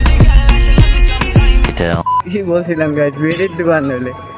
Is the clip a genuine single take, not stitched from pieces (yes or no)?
no